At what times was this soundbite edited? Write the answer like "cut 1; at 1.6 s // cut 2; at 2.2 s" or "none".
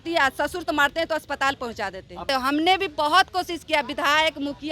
cut 1; at 2.3 s